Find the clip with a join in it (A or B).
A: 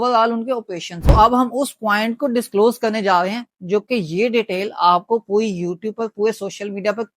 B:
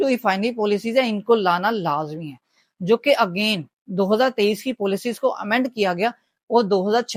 A